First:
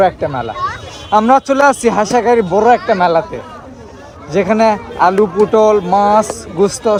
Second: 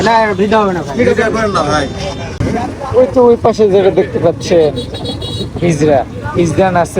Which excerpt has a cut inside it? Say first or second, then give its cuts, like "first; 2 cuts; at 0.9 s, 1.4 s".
second; 1 cut; at 2.2 s